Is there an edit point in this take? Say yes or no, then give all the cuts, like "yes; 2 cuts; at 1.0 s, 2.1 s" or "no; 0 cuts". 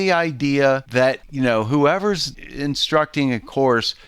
yes; 2 cuts; at 1.1 s, 2.3 s